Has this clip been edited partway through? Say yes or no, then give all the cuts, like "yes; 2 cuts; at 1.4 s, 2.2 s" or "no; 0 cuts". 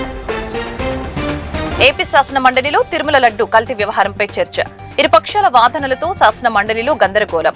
yes; 1 cut; at 1.7 s